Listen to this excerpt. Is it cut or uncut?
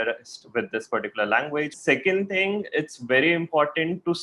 cut